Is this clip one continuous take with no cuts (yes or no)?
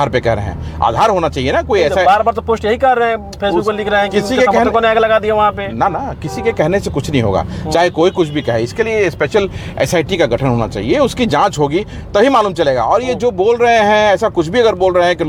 yes